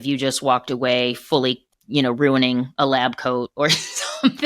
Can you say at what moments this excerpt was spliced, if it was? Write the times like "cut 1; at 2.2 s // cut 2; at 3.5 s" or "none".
cut 1; at 1.7 s